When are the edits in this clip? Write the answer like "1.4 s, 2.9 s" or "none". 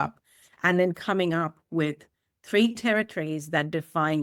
none